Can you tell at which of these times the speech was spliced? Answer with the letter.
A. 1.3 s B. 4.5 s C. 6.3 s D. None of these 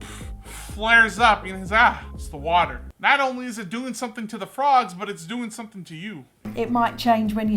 C